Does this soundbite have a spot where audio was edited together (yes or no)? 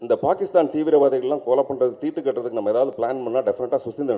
no